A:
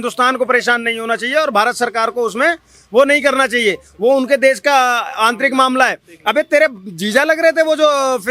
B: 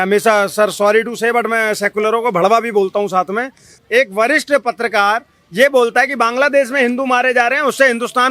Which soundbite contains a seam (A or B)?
B